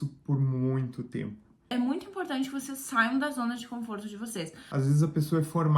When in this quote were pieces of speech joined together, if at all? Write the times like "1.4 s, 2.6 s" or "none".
1.6 s, 4.6 s